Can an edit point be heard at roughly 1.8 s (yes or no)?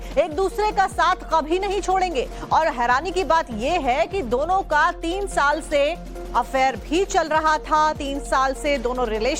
no